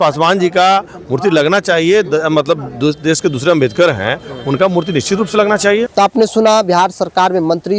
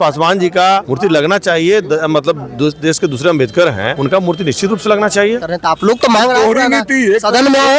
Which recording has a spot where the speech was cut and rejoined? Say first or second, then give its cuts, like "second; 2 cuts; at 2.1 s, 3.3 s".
second; 3 cuts; at 0.9 s, 3.9 s, 5.4 s